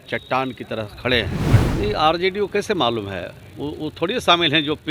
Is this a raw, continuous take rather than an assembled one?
no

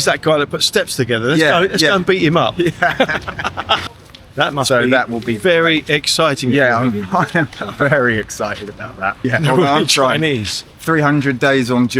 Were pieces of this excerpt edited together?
yes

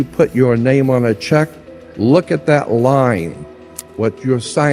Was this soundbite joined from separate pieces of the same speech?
no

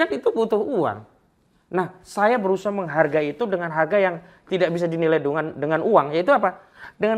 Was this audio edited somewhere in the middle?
no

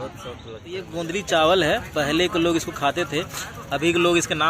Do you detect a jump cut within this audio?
yes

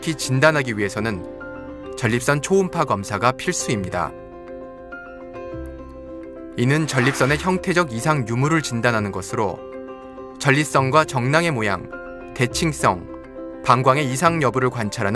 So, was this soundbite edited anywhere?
no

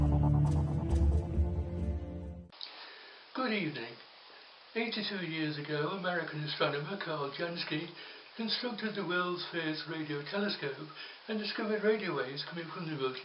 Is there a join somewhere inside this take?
no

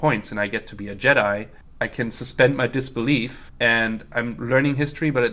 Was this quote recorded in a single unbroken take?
no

